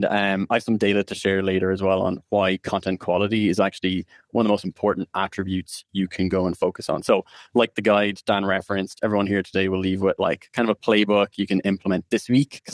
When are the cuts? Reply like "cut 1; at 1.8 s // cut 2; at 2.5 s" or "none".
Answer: none